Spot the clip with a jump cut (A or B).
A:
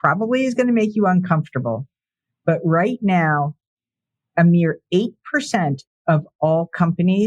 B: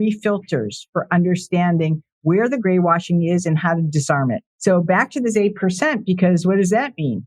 B